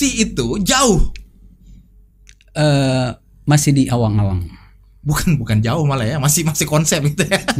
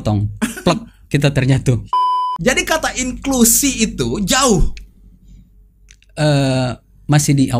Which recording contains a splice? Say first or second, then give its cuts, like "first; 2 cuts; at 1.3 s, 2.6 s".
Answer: second; 1 cut; at 2.0 s